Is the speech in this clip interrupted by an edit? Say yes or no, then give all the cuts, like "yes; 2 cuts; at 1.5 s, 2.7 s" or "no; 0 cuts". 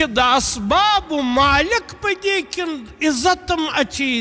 no; 0 cuts